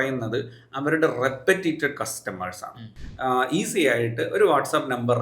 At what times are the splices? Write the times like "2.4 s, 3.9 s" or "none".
2.8 s